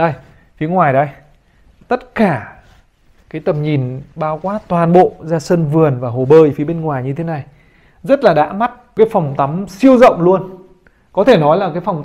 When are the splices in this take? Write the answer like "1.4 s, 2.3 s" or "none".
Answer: 1.7 s, 8.8 s